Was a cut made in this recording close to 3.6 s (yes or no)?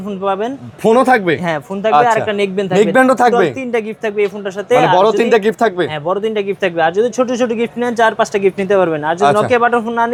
no